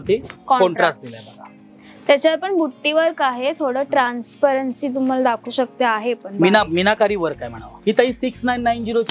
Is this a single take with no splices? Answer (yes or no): no